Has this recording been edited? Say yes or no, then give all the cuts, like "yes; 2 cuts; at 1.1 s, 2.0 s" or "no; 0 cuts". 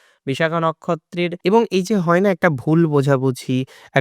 yes; 1 cut; at 1.4 s